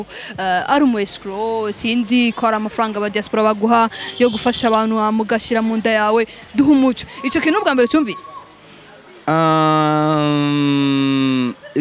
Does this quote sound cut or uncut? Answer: uncut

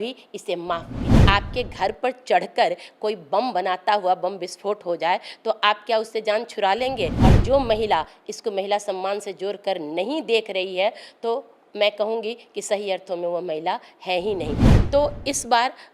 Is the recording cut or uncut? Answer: cut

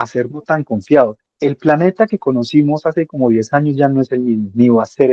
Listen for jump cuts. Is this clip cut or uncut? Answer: cut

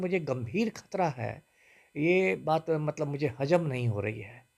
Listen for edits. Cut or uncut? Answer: uncut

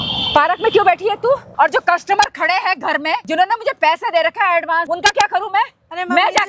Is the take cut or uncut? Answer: cut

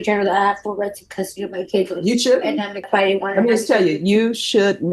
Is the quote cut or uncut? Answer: cut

